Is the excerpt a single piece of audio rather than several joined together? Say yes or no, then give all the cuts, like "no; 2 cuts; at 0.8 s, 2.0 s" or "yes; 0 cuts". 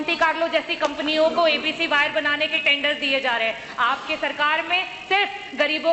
yes; 0 cuts